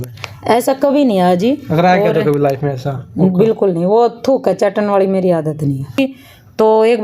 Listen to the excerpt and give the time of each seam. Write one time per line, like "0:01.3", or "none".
0:06.0